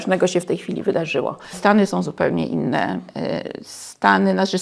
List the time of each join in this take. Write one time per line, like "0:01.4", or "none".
0:01.5